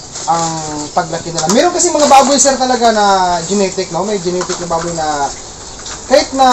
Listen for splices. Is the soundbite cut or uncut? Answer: uncut